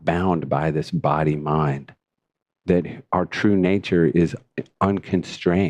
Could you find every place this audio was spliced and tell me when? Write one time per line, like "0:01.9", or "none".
none